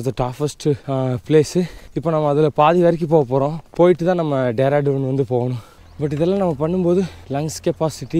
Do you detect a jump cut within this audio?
no; 0 cuts

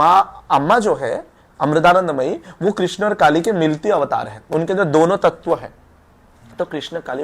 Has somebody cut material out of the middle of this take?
no; 0 cuts

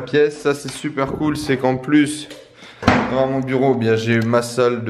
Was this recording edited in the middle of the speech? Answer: no; 0 cuts

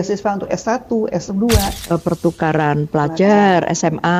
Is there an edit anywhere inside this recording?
yes; 1 cut; at 1.8 s

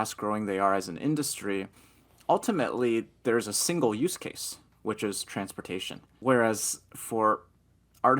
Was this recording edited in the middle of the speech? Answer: yes; 1 cut; at 6.2 s

